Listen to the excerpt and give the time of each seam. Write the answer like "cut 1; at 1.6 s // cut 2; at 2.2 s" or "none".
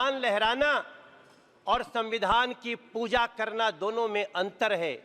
none